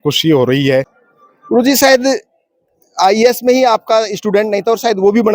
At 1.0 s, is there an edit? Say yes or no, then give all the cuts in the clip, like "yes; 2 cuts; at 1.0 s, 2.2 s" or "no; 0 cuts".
yes; 1 cut; at 1.0 s